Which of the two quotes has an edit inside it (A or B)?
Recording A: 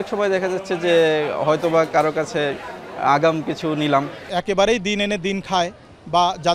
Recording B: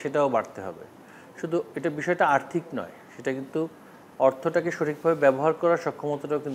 A